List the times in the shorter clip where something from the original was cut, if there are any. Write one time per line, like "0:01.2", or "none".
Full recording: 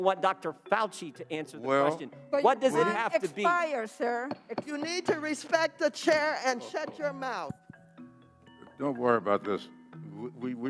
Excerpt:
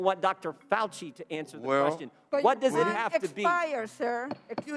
none